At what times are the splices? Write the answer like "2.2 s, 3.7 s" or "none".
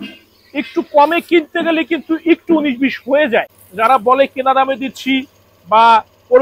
3.6 s